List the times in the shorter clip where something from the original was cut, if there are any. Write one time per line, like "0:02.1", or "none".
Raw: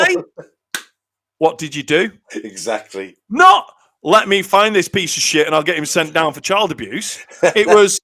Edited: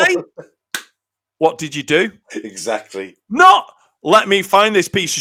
none